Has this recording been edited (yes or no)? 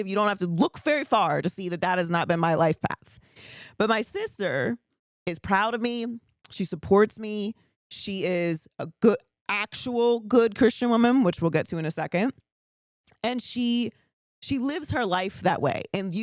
no